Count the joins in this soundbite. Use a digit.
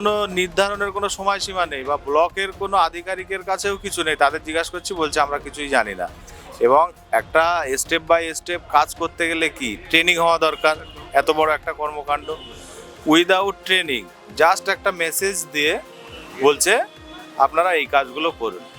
0